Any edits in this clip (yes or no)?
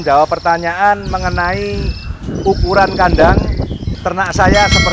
yes